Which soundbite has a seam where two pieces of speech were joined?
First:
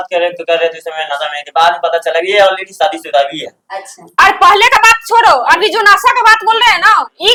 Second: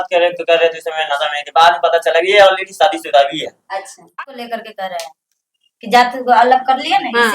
second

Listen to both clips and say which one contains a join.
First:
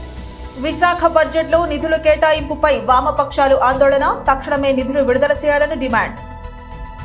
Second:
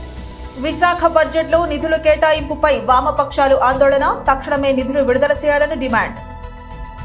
second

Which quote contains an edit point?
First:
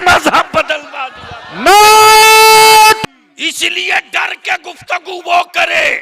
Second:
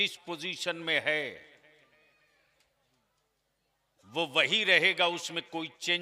first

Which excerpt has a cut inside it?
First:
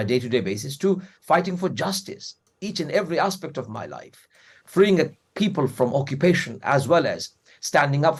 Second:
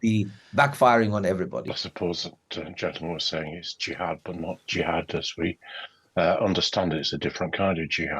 second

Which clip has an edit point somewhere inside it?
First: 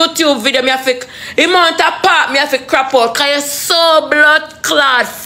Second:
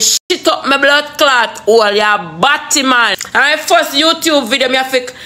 second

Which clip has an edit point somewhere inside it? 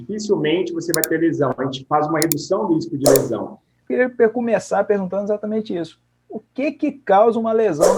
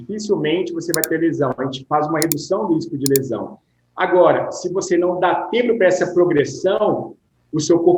first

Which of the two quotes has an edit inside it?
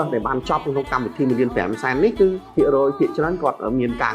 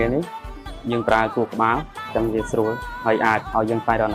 first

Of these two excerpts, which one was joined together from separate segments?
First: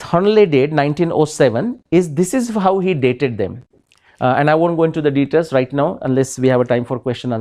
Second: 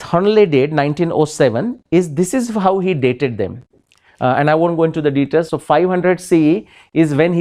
second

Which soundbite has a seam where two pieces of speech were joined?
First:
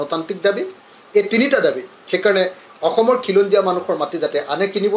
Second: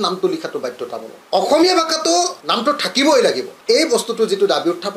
second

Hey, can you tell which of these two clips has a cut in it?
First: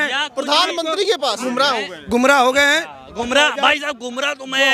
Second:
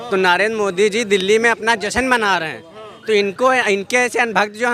first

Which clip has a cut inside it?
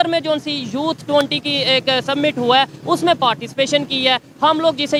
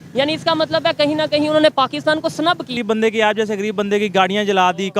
second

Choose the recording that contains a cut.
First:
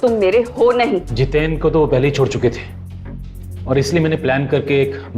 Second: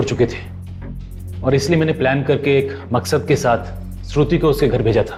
first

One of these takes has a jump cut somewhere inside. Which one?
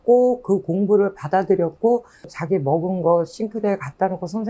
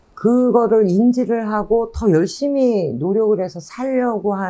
first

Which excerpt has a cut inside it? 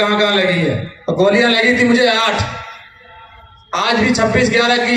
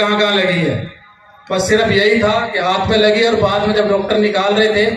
first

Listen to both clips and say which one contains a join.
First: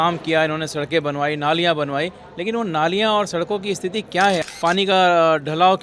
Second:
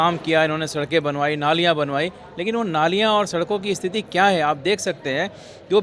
first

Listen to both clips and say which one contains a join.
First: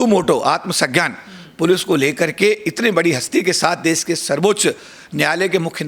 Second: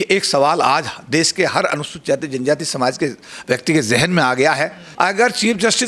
second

